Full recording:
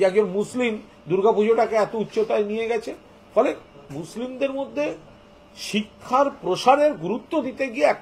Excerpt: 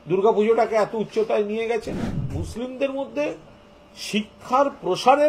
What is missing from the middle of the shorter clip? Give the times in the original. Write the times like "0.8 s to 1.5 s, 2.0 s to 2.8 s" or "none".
3.1 s to 3.7 s